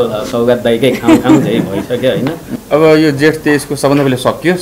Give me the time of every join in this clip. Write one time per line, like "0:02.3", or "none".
0:02.5